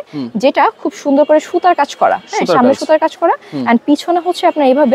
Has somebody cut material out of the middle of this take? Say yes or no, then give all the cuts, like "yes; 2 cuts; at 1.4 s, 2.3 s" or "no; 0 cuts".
no; 0 cuts